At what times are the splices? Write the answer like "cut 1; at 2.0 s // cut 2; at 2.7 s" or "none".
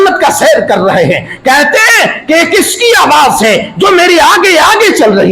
none

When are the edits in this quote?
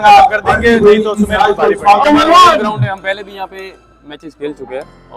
cut 1; at 2.1 s

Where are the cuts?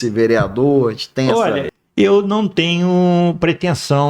cut 1; at 1.7 s

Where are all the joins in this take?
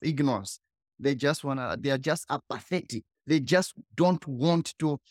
none

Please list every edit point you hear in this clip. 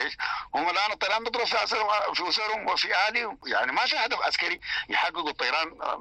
cut 1; at 3.4 s

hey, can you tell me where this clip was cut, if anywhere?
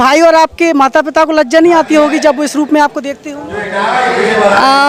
none

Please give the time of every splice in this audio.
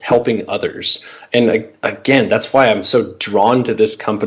none

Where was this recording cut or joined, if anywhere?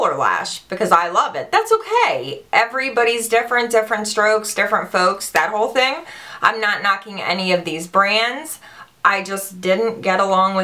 cut 1; at 6.8 s

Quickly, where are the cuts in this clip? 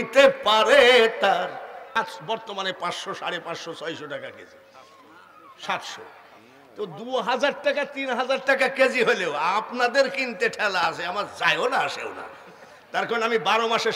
cut 1; at 1.9 s

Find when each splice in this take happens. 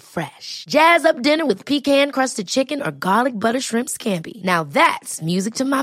none

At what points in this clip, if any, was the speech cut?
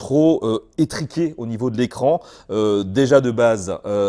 none

